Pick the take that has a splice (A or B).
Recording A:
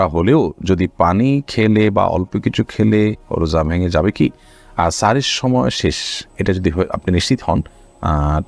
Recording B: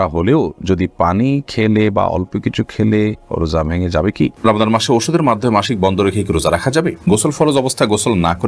B